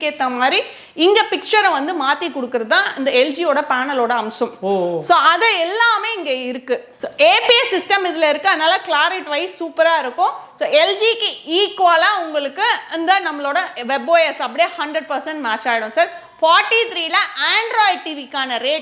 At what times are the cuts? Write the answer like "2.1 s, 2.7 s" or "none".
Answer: none